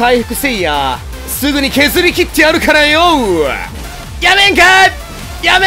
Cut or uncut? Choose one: uncut